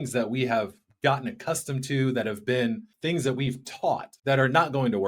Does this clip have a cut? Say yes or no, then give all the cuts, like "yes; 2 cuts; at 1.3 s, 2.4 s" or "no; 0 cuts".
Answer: yes; 2 cuts; at 2.9 s, 4.1 s